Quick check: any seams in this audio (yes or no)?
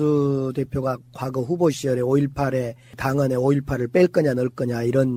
no